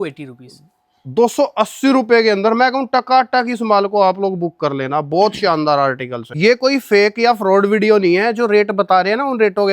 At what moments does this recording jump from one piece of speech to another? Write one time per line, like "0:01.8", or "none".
0:06.2